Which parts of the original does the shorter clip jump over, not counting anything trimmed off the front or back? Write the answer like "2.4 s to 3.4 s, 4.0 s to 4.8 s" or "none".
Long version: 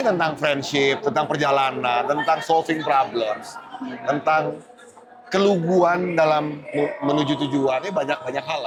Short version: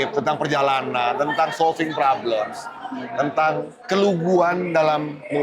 4.6 s to 5.2 s